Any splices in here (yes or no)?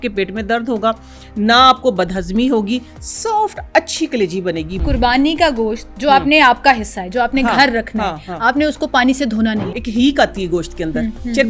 yes